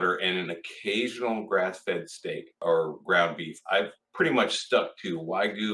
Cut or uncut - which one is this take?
cut